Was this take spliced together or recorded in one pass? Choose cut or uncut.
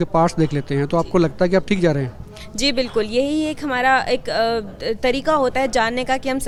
uncut